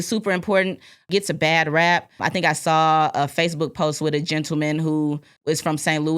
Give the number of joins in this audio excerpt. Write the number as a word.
three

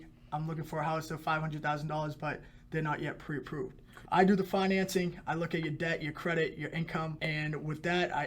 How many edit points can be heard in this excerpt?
two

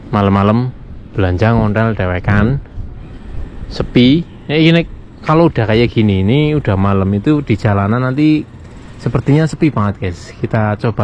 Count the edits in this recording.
zero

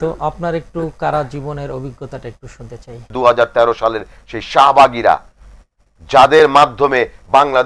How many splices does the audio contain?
one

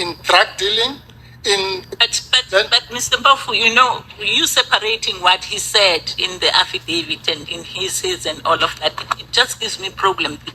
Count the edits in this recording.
one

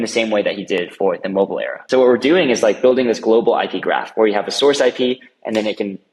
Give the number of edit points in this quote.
one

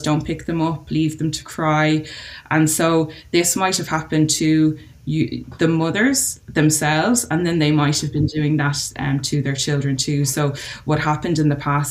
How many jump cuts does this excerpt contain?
zero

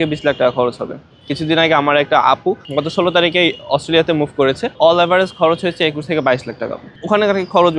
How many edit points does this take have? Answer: two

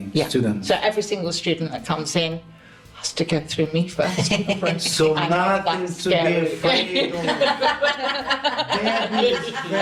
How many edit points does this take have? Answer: zero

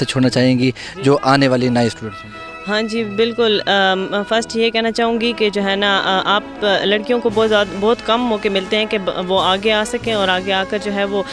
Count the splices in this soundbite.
zero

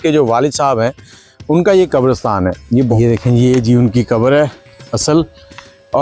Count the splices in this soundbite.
one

